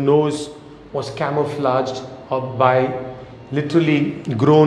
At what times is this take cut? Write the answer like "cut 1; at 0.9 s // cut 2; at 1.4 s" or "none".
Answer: none